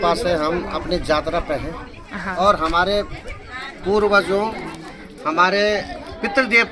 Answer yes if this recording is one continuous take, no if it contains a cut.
yes